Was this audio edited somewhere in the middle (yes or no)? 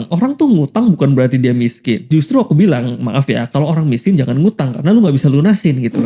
no